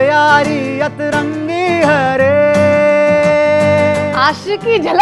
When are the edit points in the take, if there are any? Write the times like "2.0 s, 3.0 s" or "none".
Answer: 4.1 s